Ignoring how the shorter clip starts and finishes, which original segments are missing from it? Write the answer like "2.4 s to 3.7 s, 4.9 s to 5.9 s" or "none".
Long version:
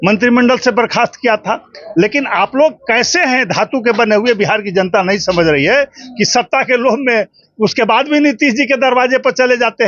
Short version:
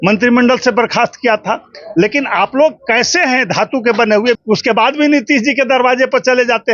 4.4 s to 7.5 s